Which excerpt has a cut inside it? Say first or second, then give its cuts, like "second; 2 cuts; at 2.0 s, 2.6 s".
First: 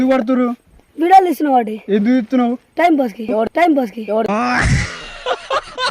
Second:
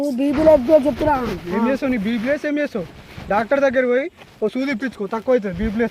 first; 1 cut; at 3.5 s